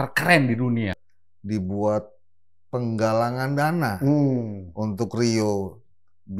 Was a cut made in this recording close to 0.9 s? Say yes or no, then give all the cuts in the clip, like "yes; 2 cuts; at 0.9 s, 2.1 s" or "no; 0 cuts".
yes; 1 cut; at 0.9 s